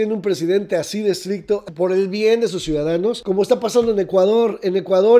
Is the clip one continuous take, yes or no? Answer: no